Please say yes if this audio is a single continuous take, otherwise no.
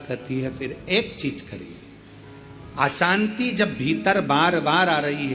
yes